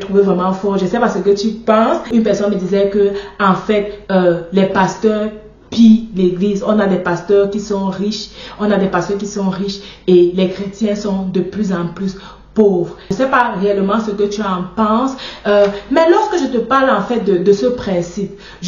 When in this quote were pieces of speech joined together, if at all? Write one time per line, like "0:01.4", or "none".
0:02.1
0:13.1